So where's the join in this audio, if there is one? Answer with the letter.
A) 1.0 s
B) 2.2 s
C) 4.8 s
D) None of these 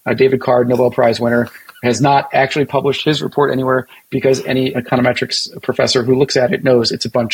C